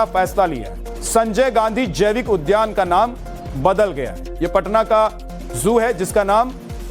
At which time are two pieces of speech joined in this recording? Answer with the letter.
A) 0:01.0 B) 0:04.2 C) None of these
B